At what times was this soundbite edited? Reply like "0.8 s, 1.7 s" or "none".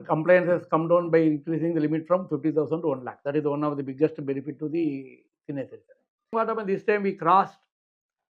6.3 s